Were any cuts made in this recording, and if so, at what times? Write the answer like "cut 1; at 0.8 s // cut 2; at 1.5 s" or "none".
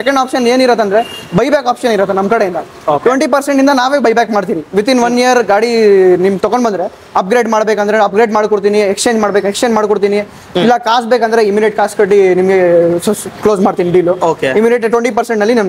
none